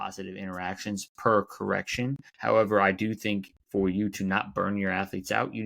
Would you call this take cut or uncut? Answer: cut